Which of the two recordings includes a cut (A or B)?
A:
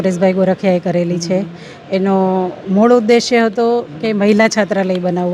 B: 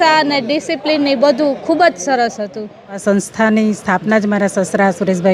B